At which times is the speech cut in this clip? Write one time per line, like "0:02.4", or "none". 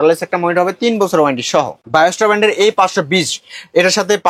0:01.7